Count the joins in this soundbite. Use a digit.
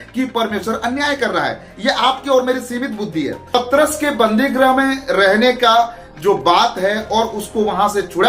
1